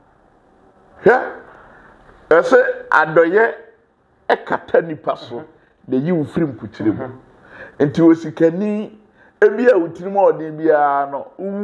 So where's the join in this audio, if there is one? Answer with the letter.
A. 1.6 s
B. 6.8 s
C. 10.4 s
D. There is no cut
D